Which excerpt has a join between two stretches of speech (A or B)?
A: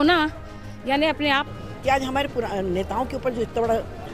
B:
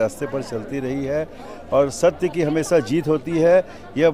A